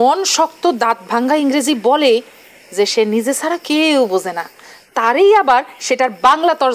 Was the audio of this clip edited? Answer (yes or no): no